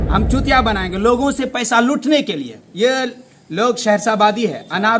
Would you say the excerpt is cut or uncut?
uncut